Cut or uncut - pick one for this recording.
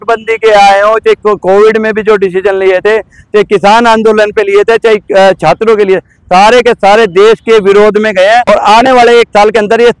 cut